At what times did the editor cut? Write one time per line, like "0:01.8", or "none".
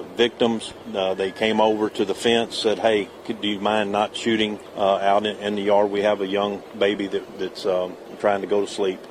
0:04.6
0:08.0